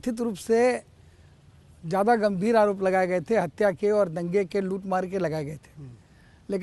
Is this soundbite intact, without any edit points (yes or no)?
yes